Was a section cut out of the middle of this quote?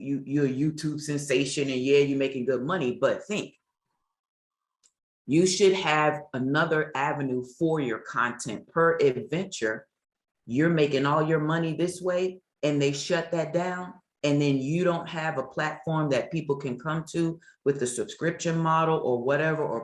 no; 0 cuts

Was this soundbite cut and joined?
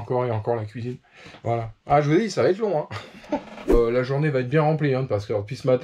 yes; 1 cut; at 3.7 s

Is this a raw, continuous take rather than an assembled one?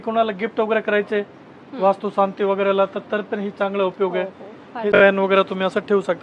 no; 1 cut; at 4.9 s

